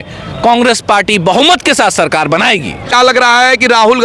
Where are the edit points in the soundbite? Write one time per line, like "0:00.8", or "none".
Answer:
none

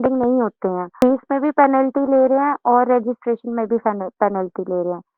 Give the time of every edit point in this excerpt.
0:01.0

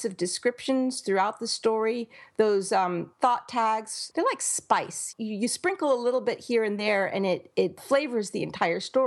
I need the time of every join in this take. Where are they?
0:03.1
0:04.0
0:05.1
0:07.8

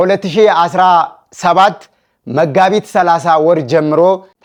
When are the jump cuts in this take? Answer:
none

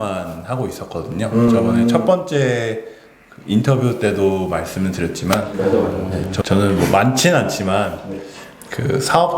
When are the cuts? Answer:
0:06.3

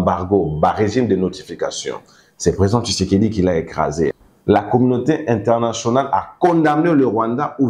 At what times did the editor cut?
0:04.2

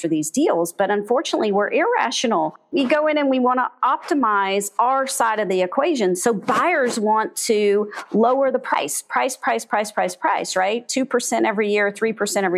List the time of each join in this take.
none

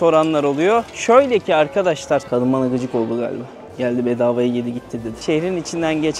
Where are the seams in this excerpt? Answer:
0:02.3
0:05.2

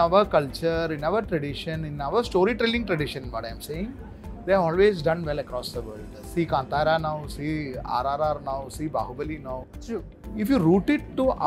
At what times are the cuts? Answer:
none

